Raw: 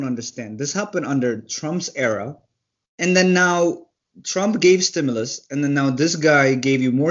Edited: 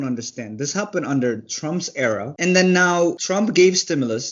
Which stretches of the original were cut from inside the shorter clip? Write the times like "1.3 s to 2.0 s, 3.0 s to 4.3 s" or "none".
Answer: 2.3 s to 2.9 s, 3.8 s to 4.3 s